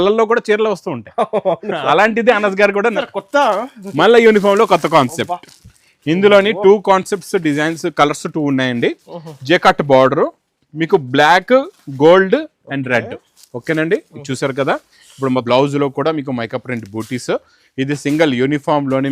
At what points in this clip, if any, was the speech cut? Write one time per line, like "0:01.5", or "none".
0:03.0
0:15.4

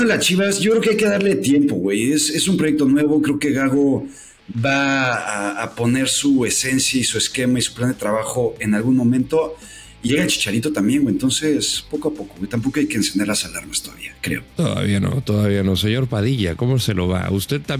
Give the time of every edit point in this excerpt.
none

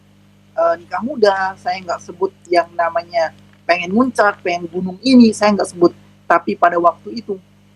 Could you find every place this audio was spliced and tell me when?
none

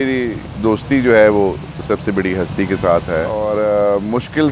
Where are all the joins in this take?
0:03.3

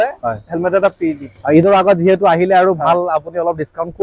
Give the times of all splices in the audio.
none

